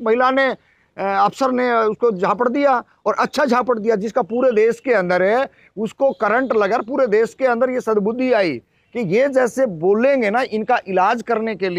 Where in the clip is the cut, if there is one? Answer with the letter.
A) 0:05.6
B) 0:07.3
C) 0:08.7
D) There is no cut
D